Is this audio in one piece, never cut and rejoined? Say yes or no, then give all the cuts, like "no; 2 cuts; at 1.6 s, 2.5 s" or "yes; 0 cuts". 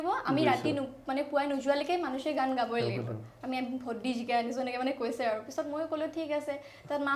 yes; 0 cuts